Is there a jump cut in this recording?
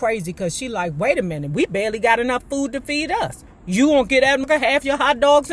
yes; 1 cut; at 4.5 s

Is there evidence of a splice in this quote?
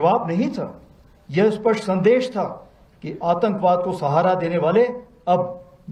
no; 0 cuts

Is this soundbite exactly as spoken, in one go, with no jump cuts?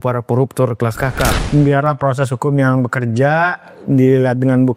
no; 1 cut; at 1.4 s

